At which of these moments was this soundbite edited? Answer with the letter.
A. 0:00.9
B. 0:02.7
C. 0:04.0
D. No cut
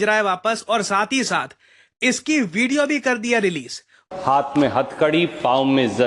C